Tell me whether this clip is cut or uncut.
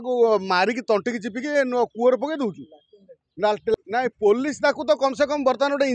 cut